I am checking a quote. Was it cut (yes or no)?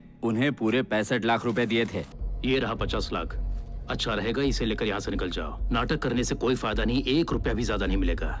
yes